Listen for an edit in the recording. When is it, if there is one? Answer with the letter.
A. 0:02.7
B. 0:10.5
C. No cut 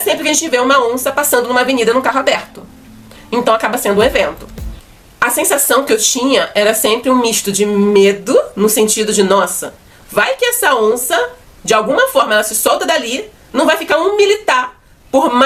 C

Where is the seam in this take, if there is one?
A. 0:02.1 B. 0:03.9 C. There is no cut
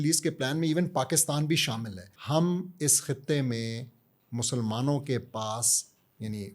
A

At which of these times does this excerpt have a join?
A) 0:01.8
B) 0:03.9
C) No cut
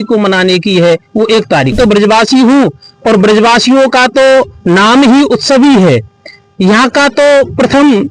A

